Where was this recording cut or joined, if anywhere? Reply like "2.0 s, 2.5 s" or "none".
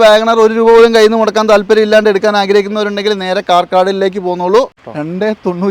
4.8 s